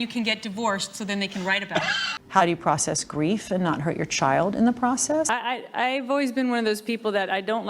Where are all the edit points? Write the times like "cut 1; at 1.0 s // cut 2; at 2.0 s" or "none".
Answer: cut 1; at 2.1 s // cut 2; at 5.3 s